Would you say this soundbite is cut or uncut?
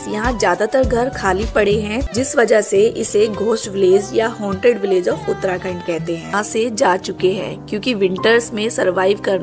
cut